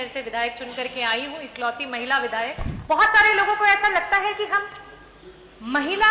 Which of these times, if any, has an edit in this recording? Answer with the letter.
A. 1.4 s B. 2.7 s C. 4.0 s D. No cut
B